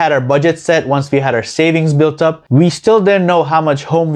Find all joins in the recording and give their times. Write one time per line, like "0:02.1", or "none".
0:02.4